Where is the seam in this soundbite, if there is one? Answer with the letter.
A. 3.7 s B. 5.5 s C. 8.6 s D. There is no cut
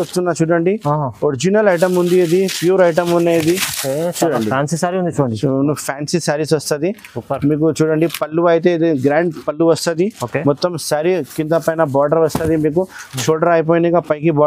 D